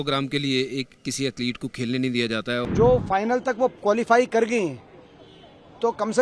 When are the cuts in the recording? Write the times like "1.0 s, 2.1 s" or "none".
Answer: 2.7 s